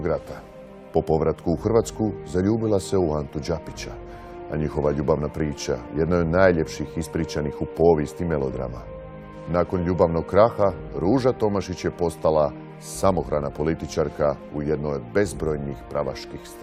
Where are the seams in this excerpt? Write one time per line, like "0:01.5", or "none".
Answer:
0:05.3